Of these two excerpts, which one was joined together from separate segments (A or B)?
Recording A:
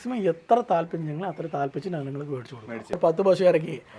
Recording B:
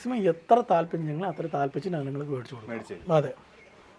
A